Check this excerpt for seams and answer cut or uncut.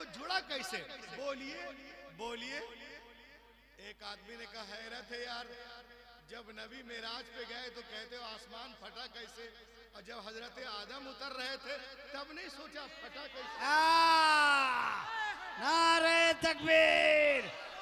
uncut